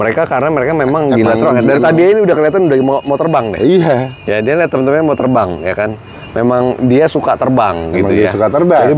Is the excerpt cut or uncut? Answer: uncut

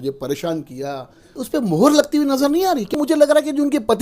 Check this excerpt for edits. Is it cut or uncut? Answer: cut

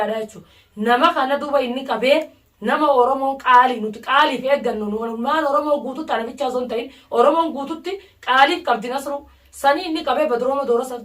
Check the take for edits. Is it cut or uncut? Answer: uncut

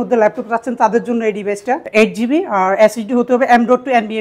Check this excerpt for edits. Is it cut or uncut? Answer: cut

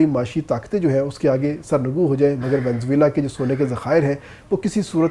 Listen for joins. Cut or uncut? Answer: uncut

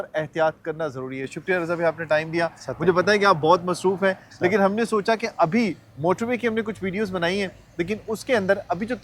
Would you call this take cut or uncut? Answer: uncut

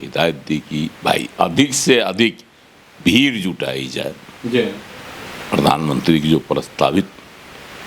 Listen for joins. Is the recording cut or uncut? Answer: uncut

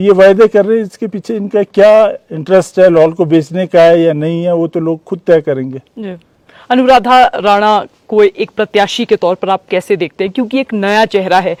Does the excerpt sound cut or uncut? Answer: uncut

